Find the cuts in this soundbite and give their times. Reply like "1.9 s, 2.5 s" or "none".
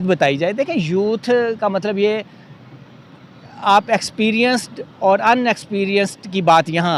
none